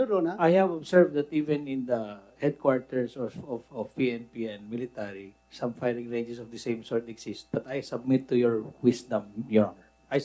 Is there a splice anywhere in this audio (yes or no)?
no